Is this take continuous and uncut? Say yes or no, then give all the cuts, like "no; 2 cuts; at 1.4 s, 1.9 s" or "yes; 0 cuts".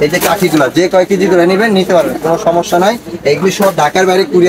yes; 0 cuts